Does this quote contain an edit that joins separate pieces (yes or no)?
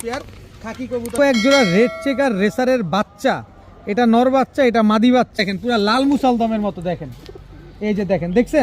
yes